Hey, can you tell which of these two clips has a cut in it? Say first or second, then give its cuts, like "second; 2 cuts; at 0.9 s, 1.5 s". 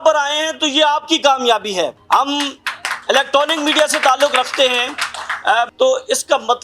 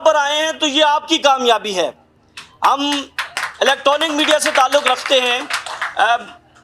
first; 2 cuts; at 2.0 s, 5.7 s